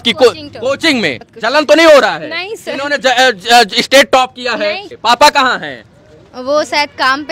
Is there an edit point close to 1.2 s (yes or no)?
yes